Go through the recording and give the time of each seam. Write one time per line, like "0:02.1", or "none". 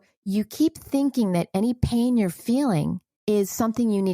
0:03.1